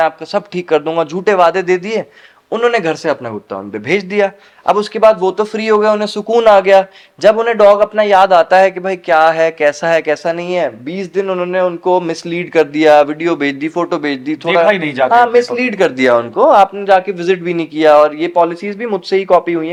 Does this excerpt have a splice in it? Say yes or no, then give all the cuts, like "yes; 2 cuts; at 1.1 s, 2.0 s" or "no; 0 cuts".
no; 0 cuts